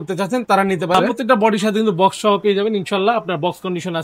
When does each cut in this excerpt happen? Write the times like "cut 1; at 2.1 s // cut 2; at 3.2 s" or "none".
cut 1; at 1.0 s